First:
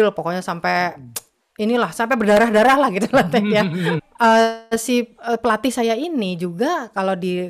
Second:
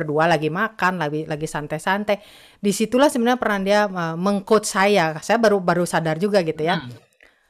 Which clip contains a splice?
first; 1 cut; at 4.0 s

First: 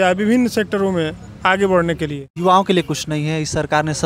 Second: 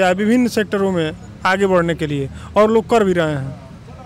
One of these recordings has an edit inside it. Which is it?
first; 1 cut; at 2.2 s

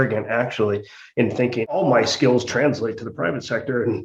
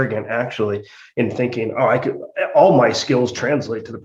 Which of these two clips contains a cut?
first; 1 cut; at 1.8 s

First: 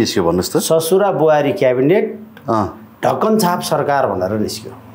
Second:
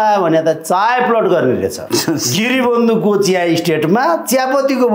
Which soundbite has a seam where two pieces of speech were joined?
second; 1 cut; at 1.8 s

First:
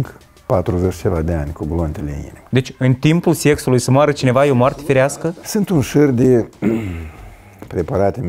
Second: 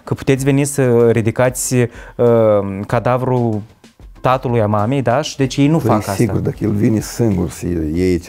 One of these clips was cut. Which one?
first; 2 cuts; at 2.4 s, 5.1 s

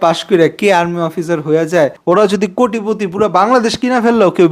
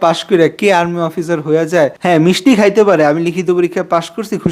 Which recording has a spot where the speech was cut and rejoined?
first; 1 cut; at 2.0 s

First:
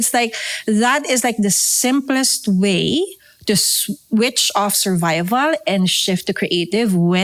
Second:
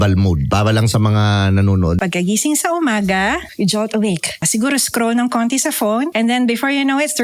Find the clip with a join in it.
second; 4 cuts; at 2.0 s, 3.5 s, 4.5 s, 6.1 s

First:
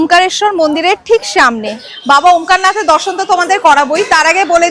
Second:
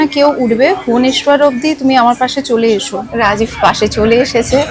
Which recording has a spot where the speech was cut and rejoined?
second; 1 cut; at 3.0 s

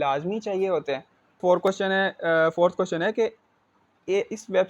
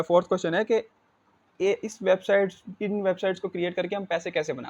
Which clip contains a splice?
first; 1 cut; at 1.4 s

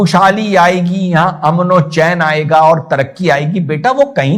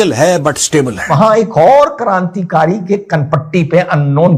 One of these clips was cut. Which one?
second; 1 cut; at 1.0 s

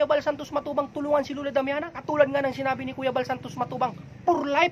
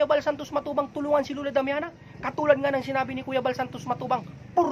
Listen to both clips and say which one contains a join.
first; 1 cut; at 1.9 s

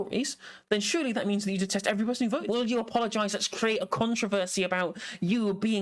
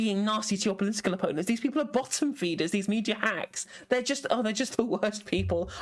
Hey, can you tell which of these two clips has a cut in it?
first; 1 cut; at 2.4 s

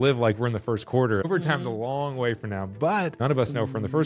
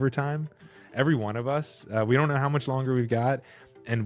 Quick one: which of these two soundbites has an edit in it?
first; 2 cuts; at 1.3 s, 3.2 s

